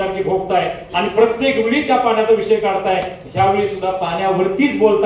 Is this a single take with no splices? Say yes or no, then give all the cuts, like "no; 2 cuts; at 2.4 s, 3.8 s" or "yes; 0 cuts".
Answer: yes; 0 cuts